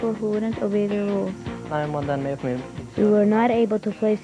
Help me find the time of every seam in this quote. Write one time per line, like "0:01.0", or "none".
0:01.7